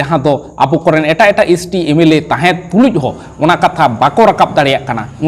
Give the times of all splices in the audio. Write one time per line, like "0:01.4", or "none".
none